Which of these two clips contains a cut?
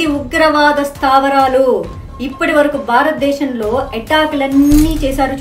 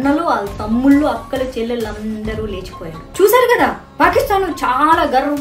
second; 1 cut; at 3.0 s

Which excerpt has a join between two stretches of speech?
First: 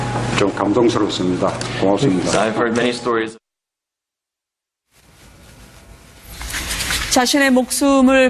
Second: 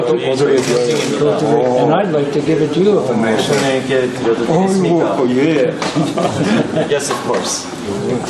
first; 1 cut; at 2.5 s

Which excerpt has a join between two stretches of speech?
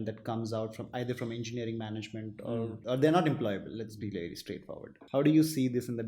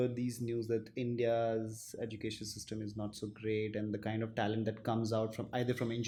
first; 2 cuts; at 2.8 s, 4.9 s

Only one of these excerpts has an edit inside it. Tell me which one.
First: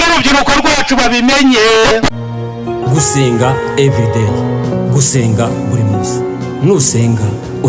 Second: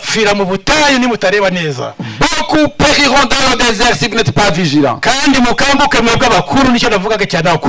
first; 1 cut; at 2.1 s

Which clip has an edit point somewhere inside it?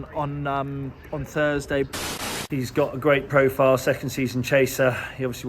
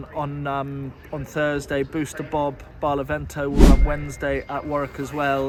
first; 1 cut; at 1.9 s

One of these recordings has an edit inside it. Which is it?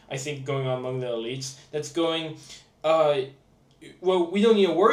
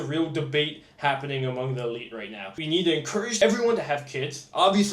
second; 2 cuts; at 2.5 s, 3.4 s

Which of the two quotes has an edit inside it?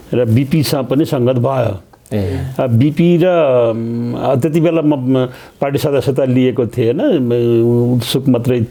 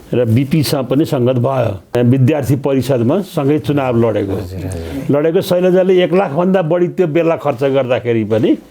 second; 1 cut; at 2.0 s

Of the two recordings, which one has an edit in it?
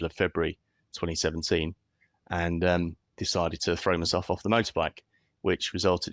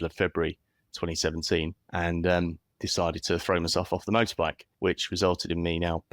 second; 2 cuts; at 1.8 s, 4.6 s

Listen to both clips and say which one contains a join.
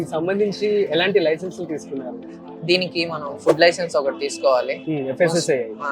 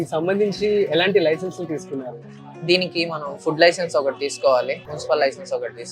second; 1 cut; at 4.8 s

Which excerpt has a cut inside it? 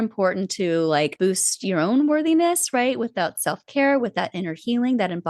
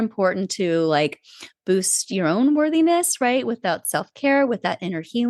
first; 1 cut; at 1.1 s

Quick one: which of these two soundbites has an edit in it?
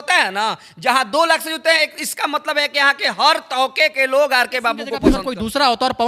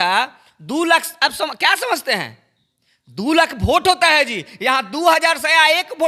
first; 1 cut; at 5.0 s

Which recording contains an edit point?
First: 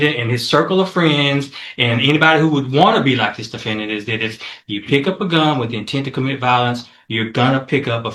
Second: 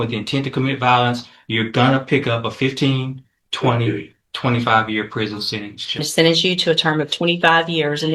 second; 1 cut; at 6.1 s

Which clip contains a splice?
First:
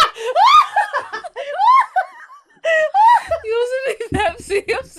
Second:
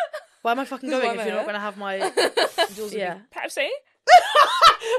second; 1 cut; at 2.7 s

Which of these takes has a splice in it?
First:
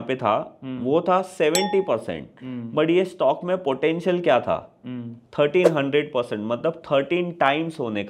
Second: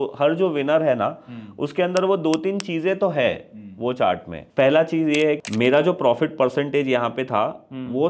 second; 2 cuts; at 4.4 s, 5.4 s

